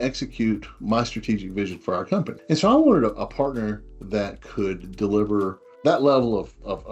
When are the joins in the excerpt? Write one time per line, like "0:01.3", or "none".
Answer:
0:02.3
0:05.6